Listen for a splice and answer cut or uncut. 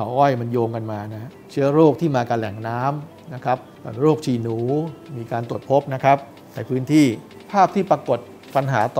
cut